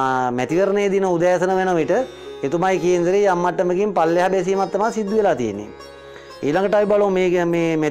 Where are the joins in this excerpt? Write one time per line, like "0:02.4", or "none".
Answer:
none